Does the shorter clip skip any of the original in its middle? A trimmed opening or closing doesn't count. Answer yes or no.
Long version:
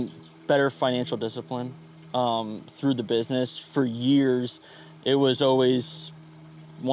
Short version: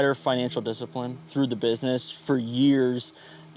yes